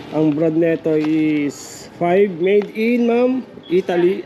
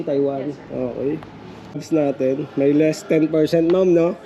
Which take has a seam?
second; 1 cut; at 1.8 s

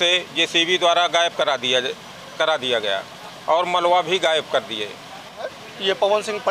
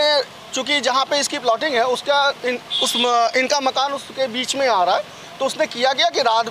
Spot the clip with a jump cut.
first; 1 cut; at 5.6 s

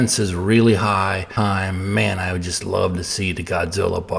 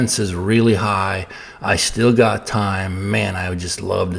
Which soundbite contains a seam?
first; 1 cut; at 1.3 s

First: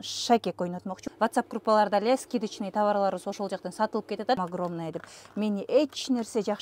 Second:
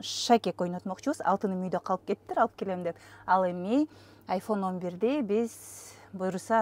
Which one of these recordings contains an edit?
first; 2 cuts; at 1.0 s, 4.5 s

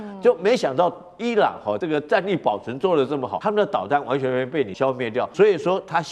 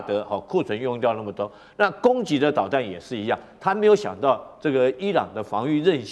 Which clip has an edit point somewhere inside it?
first; 3 cuts; at 1.8 s, 3.3 s, 4.9 s

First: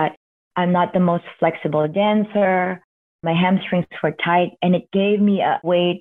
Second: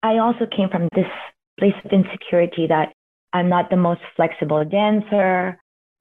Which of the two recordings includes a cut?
second; 1 cut; at 0.9 s

